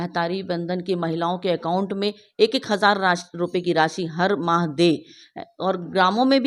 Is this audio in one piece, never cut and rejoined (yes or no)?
yes